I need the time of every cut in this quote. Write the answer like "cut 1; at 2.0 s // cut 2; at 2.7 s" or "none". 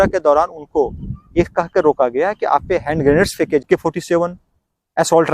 cut 1; at 3.6 s